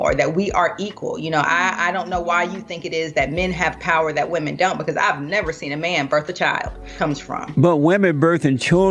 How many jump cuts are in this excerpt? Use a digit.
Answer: 1